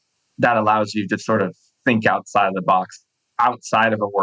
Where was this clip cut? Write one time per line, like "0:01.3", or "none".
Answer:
0:03.2